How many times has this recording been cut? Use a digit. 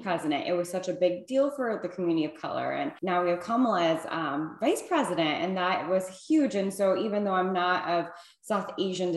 1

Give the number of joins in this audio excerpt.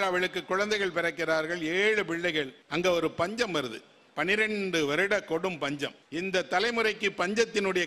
2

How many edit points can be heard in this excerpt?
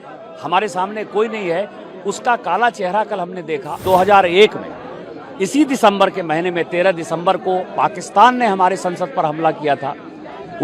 1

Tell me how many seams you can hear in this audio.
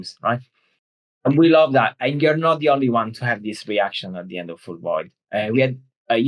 0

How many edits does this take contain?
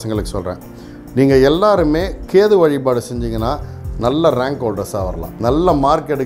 1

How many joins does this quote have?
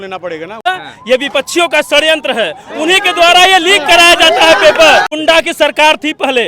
2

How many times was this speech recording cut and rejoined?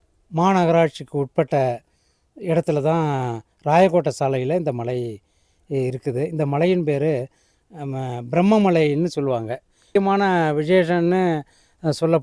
1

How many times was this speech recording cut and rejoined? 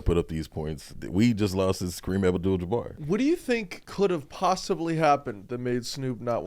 3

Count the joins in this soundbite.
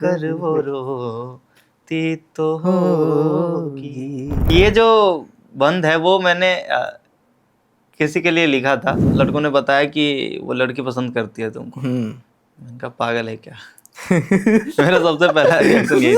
2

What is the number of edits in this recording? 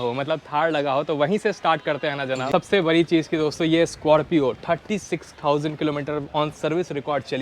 1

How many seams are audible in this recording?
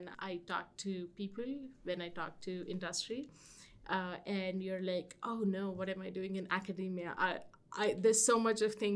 0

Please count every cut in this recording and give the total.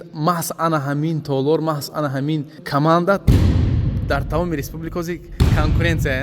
1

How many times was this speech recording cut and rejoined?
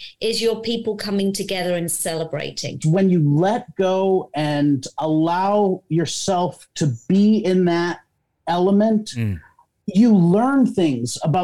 1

